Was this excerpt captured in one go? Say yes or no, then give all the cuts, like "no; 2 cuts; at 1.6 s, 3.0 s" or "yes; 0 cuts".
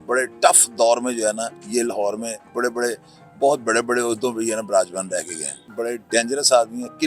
no; 1 cut; at 5.7 s